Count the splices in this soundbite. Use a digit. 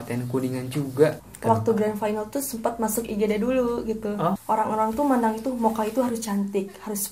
2